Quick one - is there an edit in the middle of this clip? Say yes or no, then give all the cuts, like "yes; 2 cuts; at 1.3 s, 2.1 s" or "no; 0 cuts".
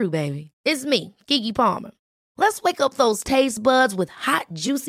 no; 0 cuts